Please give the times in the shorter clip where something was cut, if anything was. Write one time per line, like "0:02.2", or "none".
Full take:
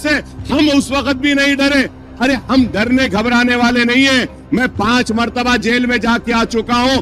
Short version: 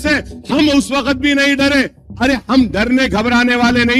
none